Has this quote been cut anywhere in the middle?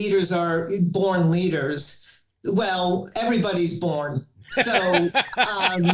no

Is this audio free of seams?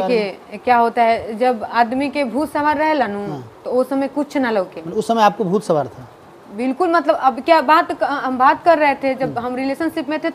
yes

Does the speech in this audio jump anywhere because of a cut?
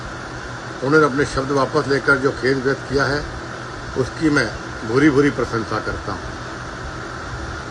no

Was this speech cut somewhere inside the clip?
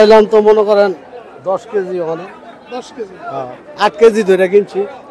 no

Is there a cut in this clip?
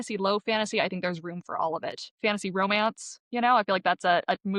no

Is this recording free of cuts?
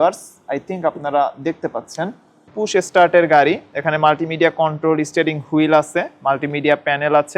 no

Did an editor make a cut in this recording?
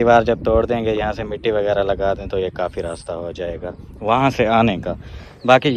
no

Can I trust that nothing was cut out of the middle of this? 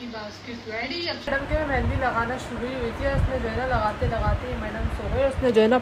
no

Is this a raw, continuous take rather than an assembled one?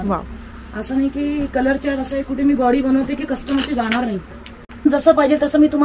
no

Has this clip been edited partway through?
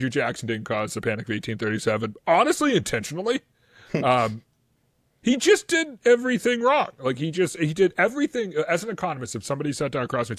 no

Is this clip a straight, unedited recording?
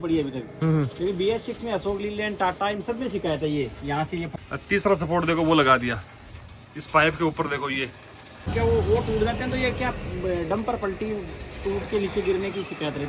no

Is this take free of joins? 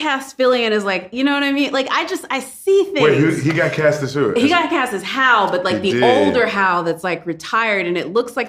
yes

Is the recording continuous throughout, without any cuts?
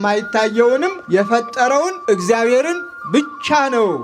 no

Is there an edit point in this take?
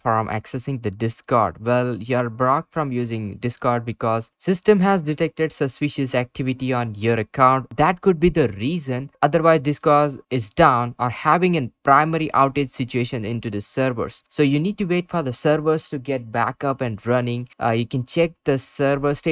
no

